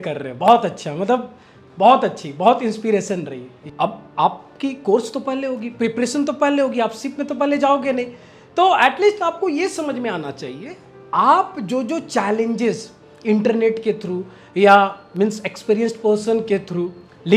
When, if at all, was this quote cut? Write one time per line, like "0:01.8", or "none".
0:03.6